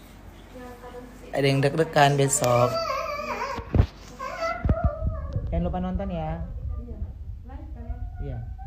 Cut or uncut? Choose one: uncut